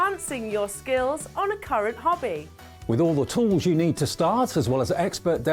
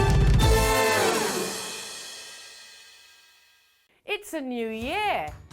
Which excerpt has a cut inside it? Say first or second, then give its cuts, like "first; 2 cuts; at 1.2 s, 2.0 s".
second; 1 cut; at 3.7 s